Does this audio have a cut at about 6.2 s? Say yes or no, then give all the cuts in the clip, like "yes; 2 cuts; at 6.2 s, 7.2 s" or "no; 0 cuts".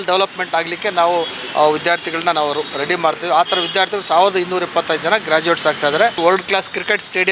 yes; 1 cut; at 6.2 s